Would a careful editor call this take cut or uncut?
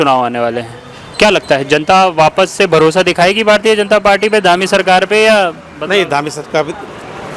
uncut